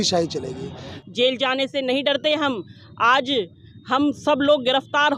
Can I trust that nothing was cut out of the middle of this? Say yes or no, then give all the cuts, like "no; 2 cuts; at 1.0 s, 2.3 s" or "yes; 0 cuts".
no; 1 cut; at 0.9 s